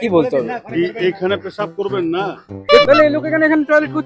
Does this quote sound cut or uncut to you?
cut